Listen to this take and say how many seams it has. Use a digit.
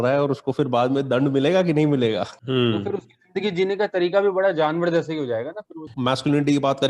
2